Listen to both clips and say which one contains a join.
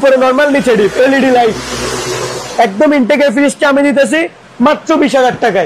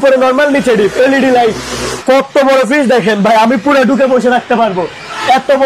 second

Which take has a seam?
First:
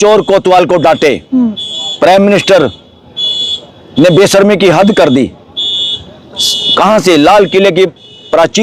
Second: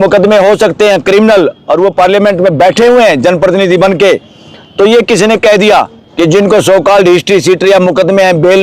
second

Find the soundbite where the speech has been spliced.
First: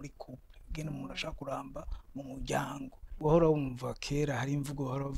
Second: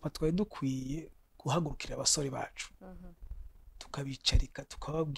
first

